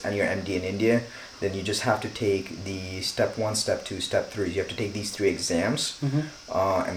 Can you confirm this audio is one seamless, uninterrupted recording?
yes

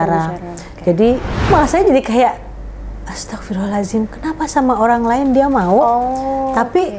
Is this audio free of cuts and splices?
no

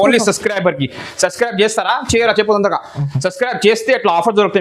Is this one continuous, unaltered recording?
yes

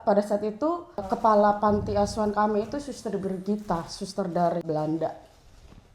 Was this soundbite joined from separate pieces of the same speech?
yes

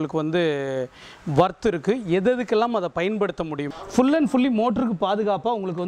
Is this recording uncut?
no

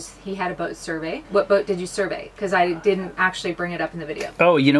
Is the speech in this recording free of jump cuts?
no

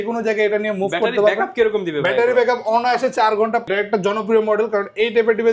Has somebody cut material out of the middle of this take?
yes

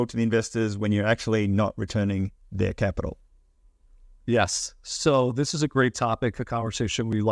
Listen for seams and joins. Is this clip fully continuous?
yes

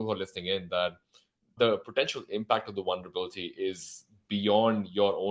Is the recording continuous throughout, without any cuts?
yes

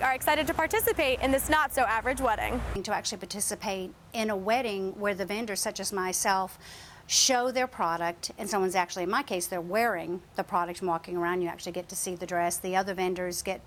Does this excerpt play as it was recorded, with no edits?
yes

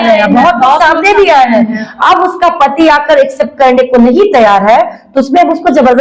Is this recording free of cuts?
yes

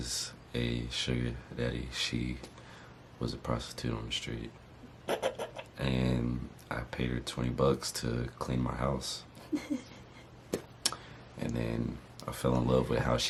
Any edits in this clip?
no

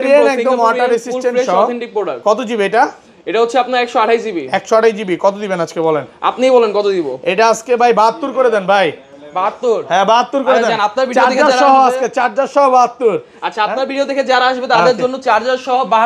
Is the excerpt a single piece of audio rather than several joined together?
yes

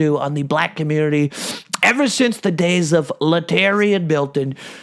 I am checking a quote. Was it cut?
no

